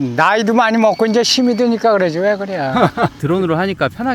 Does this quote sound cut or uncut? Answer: cut